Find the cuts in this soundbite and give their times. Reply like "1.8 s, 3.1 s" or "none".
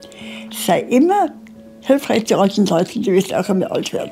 none